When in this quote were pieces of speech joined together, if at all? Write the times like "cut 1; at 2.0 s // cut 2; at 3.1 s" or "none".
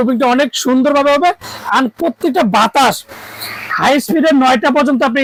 none